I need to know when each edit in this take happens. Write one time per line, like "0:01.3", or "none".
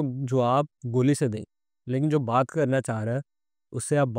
none